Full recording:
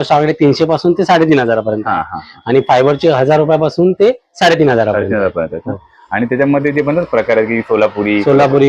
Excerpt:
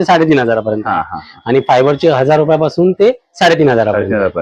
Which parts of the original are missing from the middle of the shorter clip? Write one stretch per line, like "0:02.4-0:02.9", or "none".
none